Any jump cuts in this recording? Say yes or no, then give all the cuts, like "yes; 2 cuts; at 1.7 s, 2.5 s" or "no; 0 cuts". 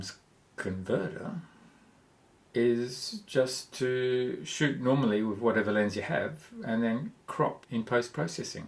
yes; 1 cut; at 7.6 s